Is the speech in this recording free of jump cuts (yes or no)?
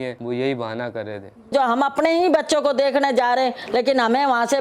yes